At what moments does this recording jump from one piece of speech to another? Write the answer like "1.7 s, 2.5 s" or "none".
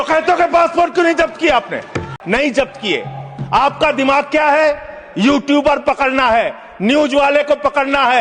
2.0 s